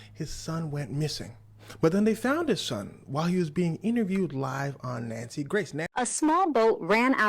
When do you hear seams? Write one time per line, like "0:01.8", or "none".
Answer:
0:05.8